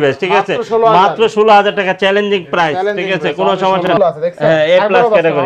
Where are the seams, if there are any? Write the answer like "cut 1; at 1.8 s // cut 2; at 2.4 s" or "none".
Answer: cut 1; at 3.9 s